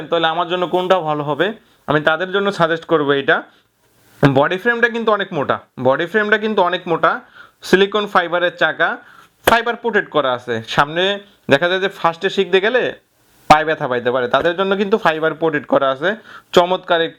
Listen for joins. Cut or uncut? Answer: uncut